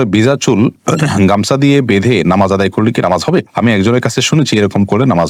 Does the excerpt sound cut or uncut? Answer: uncut